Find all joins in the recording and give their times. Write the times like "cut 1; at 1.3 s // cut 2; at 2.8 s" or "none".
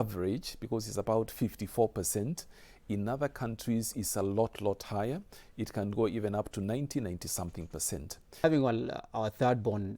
cut 1; at 8.4 s